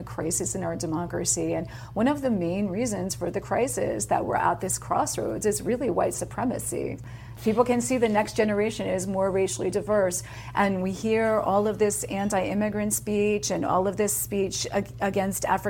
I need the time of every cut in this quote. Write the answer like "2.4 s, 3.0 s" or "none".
none